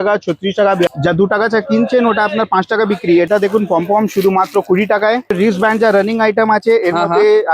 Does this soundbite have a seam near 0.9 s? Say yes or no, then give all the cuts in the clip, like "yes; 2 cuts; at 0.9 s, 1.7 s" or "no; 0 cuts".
yes; 3 cuts; at 0.9 s, 3.3 s, 5.4 s